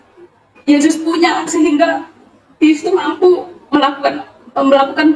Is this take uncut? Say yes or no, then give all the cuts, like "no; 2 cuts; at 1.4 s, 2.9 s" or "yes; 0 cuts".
yes; 0 cuts